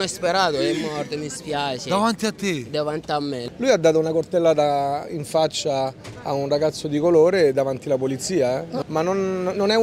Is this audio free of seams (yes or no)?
no